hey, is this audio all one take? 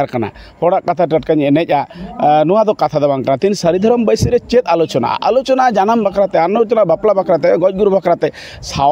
yes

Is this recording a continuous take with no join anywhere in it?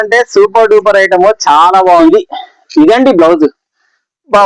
no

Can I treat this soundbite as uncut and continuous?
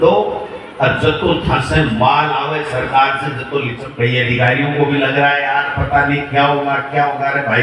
no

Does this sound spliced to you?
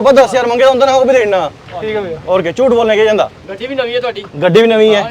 no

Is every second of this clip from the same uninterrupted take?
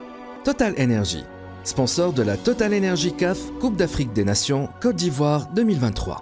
yes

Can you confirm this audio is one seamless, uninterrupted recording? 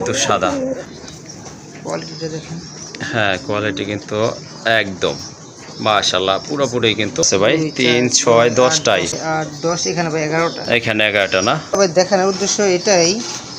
no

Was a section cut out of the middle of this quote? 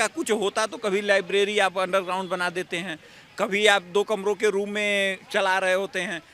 no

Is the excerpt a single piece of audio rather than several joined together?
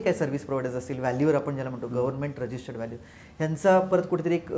yes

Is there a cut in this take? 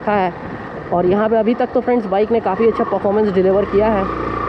no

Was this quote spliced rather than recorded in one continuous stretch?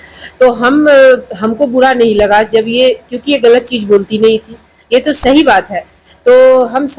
no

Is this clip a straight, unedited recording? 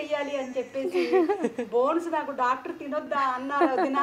no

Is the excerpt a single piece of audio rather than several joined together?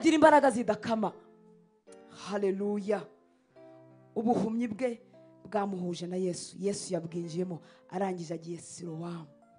yes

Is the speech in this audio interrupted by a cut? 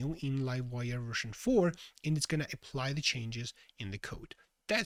no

